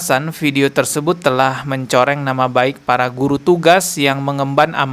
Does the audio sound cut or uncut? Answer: uncut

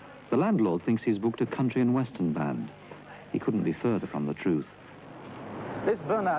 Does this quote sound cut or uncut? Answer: cut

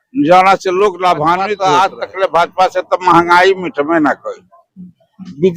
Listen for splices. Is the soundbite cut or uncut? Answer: cut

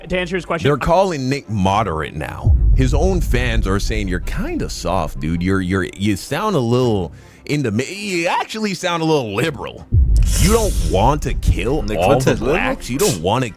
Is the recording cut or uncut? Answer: uncut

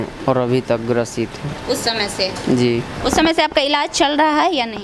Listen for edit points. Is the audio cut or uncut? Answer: uncut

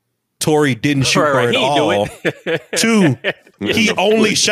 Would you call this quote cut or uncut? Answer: cut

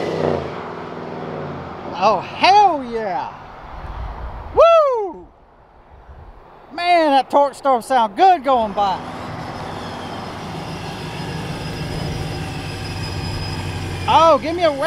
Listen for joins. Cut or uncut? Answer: cut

